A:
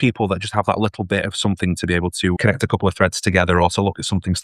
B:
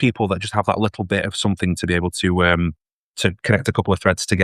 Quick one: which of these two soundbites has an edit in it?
A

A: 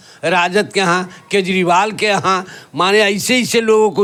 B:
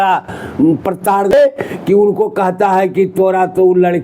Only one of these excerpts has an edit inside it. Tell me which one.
B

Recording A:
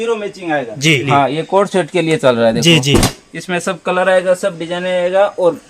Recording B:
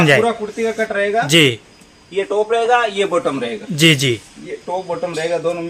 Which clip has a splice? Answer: A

